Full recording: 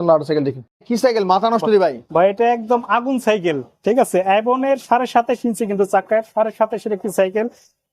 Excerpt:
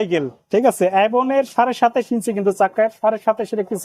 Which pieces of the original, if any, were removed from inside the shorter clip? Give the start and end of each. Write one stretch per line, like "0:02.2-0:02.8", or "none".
none